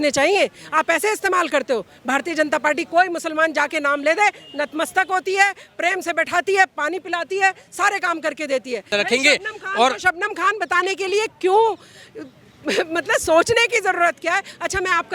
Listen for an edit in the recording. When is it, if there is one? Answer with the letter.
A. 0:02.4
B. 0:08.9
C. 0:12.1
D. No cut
B